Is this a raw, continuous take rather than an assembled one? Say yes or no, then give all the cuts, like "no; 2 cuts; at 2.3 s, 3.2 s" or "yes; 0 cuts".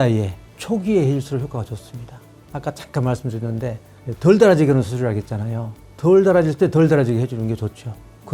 yes; 0 cuts